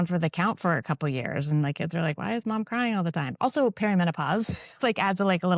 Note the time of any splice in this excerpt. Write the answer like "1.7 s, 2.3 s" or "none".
none